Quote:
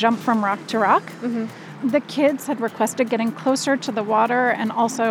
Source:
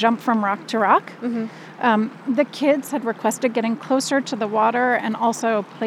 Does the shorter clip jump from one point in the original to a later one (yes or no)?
yes